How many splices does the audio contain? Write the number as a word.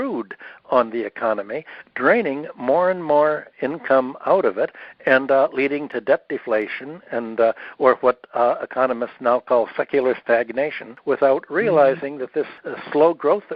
two